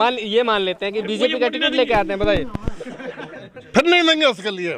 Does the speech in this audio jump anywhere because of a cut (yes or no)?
no